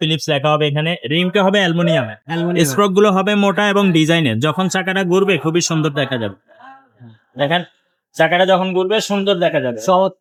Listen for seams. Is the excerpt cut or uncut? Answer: uncut